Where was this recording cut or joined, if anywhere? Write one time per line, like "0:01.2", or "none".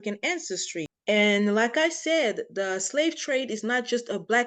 0:00.9